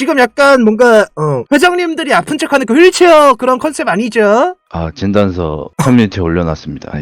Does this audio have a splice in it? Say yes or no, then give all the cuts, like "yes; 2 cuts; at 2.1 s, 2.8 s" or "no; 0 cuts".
yes; 1 cut; at 5.6 s